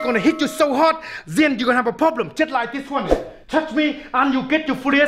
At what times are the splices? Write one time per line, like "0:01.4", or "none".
none